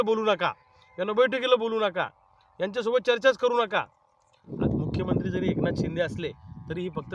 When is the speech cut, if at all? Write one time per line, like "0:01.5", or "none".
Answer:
0:04.4